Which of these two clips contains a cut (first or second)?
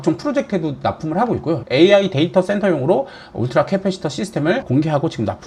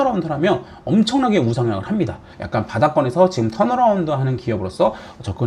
second